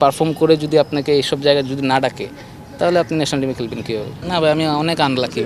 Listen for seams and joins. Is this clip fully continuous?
no; 1 cut; at 4.1 s

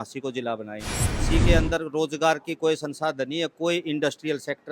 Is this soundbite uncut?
no; 1 cut; at 1.2 s

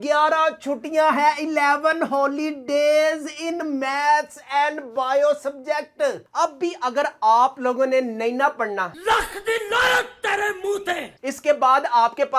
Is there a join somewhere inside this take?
yes; 3 cuts; at 6.2 s, 8.9 s, 11.1 s

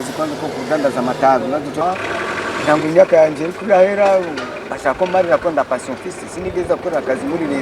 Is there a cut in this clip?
yes; 1 cut; at 1.8 s

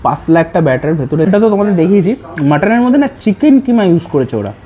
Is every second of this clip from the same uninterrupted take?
no; 1 cut; at 1.3 s

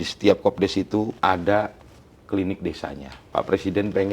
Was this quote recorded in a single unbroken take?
no; 2 cuts; at 1.1 s, 3.1 s

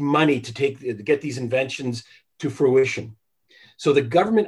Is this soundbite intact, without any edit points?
yes; 0 cuts

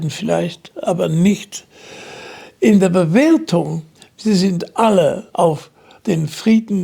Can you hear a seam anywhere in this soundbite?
no; 0 cuts

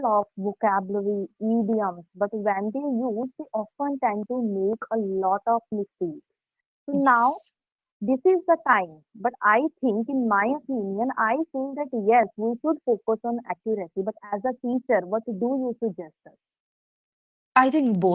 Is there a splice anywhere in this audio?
no; 0 cuts

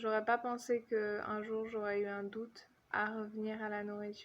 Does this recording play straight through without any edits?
no; 1 cut; at 2.9 s

